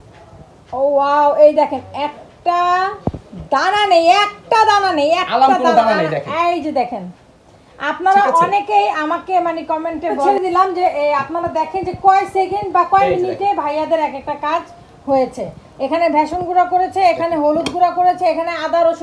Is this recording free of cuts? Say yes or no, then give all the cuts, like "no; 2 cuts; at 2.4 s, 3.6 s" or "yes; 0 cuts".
no; 1 cut; at 10.3 s